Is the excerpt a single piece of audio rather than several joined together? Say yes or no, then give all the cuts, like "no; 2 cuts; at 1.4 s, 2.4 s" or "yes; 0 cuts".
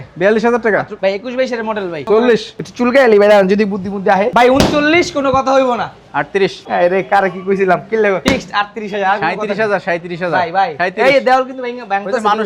no; 6 cuts; at 0.9 s, 2.0 s, 4.3 s, 6.6 s, 8.2 s, 10.7 s